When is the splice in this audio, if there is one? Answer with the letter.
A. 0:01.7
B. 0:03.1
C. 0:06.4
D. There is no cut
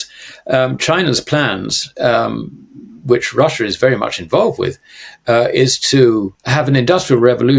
C